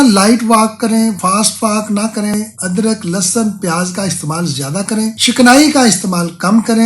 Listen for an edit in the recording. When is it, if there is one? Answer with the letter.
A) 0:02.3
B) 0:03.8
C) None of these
A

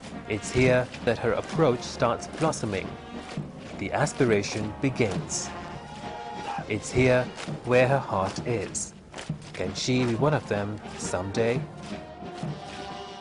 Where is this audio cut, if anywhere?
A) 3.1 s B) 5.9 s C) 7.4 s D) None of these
C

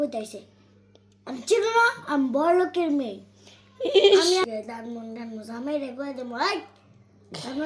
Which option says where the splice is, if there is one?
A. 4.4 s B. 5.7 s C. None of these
A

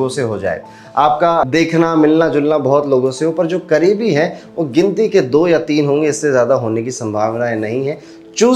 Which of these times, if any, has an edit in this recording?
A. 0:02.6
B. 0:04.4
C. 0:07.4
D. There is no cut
D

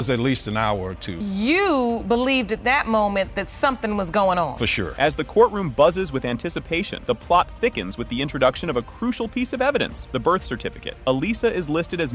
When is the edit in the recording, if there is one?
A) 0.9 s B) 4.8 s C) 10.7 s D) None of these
D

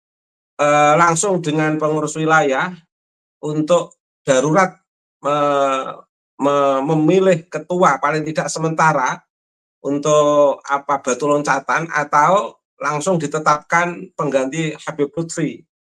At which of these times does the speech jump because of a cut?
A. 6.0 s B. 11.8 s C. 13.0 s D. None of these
D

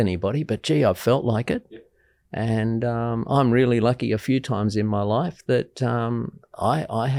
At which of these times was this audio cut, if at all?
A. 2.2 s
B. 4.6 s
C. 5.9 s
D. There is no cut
D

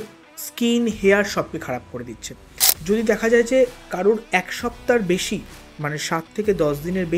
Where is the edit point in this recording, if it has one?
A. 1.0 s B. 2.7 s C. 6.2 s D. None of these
B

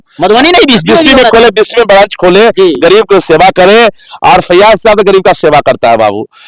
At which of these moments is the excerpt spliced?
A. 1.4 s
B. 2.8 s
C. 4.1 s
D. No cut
D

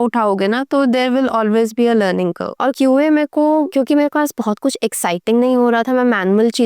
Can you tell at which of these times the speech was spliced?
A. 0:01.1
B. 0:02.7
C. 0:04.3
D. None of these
D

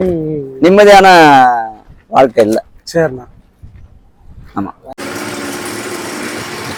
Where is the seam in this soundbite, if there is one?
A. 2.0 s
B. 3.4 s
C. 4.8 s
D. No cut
D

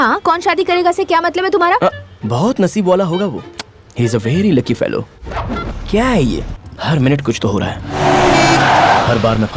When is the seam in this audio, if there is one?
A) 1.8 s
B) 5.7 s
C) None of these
B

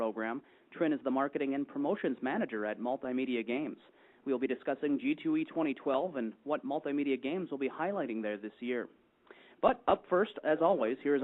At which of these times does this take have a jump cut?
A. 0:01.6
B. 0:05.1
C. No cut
C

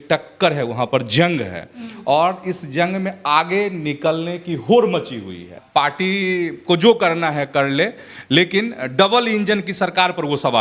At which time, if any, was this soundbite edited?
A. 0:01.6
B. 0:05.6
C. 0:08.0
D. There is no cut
B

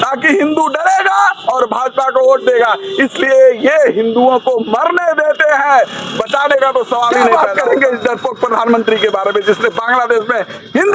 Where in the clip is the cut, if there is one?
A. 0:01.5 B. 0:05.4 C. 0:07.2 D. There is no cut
C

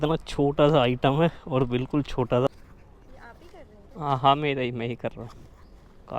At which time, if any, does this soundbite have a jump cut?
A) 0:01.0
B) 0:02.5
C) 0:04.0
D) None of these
B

